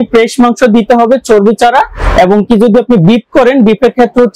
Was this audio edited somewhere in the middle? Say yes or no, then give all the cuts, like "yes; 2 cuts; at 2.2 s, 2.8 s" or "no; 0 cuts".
no; 0 cuts